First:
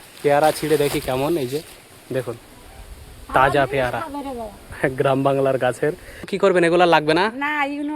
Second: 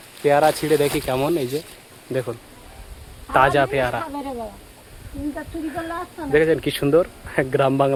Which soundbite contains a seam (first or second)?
first